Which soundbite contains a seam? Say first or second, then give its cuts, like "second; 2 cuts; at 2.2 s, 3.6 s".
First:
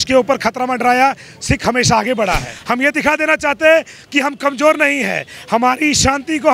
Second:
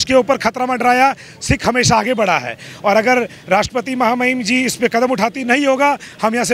first; 1 cut; at 2.5 s